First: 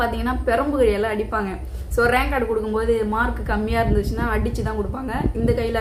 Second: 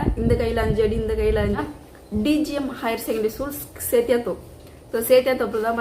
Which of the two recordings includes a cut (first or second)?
second